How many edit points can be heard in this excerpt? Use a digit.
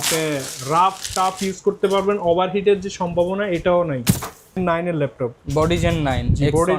1